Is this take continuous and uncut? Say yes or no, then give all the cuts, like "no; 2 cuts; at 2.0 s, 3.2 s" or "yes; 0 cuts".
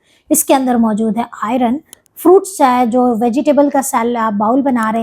no; 1 cut; at 1.9 s